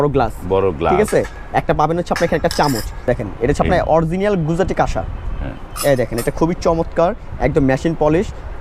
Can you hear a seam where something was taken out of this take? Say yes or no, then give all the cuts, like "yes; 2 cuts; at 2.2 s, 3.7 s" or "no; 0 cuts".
yes; 1 cut; at 3.0 s